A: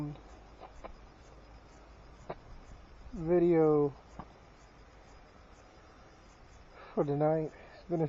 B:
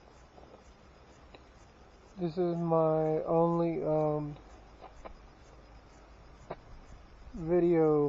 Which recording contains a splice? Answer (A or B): B